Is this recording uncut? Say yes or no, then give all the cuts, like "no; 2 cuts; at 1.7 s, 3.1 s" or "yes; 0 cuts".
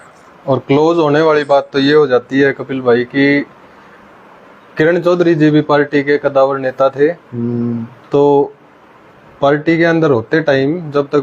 yes; 0 cuts